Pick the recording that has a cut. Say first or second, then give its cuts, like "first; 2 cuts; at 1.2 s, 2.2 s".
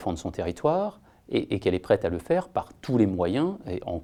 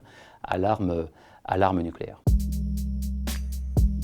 second; 1 cut; at 2.2 s